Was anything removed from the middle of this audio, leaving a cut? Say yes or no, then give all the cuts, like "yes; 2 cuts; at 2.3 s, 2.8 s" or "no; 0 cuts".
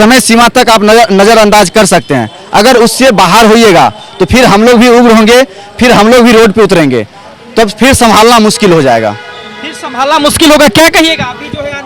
no; 0 cuts